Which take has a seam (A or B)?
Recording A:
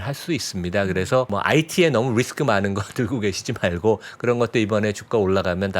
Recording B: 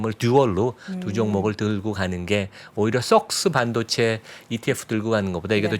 A